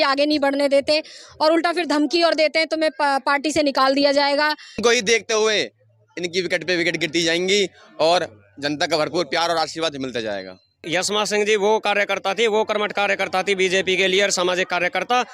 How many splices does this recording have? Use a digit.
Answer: 2